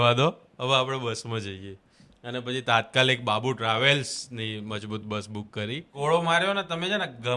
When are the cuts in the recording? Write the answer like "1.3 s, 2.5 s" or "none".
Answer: 5.9 s